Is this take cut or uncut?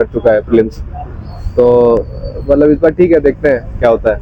uncut